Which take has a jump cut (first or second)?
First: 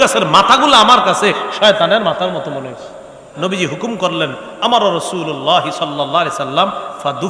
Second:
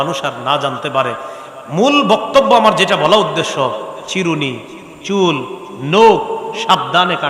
first